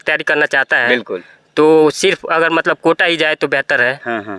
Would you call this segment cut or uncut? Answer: uncut